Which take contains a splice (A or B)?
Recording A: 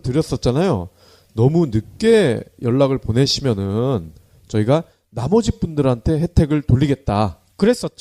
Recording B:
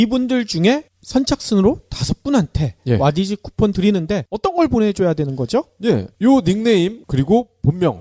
B